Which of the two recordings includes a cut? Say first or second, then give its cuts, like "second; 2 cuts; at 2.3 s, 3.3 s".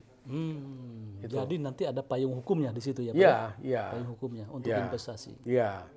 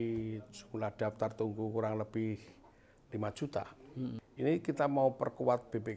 second; 1 cut; at 4.2 s